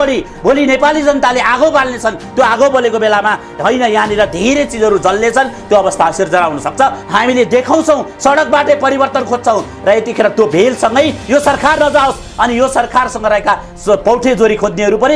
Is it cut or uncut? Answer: cut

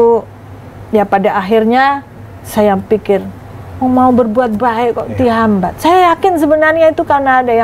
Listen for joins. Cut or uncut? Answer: uncut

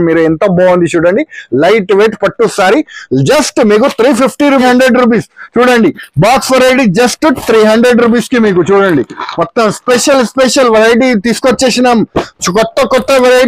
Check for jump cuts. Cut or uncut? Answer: cut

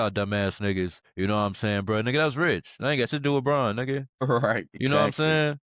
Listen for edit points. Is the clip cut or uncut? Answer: cut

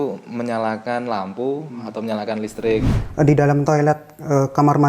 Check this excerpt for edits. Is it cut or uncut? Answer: cut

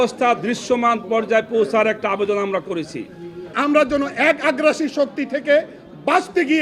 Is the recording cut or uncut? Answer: cut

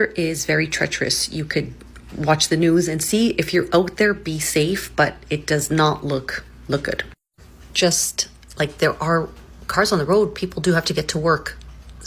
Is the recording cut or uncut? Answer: uncut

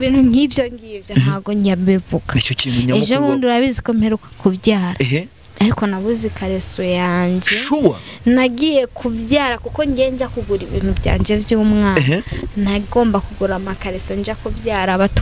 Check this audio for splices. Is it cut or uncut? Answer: uncut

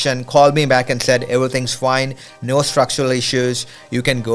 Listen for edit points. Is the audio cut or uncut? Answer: uncut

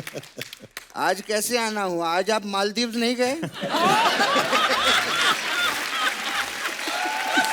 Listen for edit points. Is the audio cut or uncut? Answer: uncut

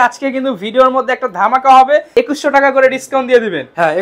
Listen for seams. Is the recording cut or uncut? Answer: cut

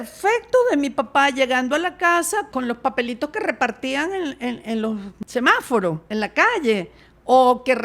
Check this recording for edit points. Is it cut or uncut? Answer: cut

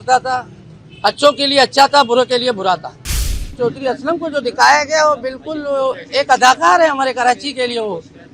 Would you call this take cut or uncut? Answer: cut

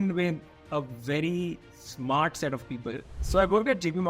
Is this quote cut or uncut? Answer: cut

